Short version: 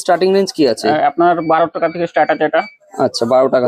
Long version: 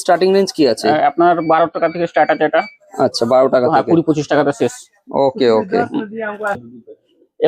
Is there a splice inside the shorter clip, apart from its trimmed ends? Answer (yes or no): no